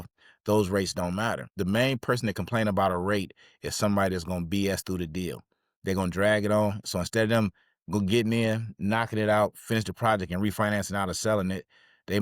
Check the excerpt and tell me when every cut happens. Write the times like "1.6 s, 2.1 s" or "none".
1.5 s